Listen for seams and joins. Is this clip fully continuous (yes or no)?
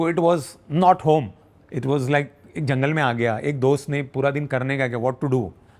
yes